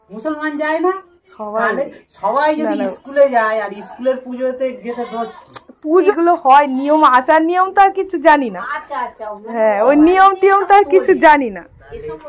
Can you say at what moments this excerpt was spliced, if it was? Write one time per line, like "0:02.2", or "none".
0:06.1